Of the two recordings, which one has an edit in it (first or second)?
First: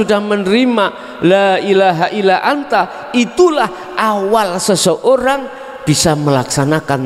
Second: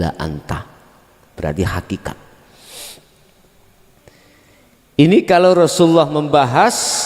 second